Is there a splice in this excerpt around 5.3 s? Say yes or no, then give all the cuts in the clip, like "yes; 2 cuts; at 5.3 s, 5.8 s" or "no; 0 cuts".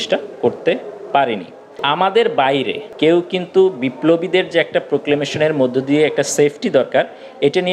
no; 2 cuts; at 1.8 s, 2.8 s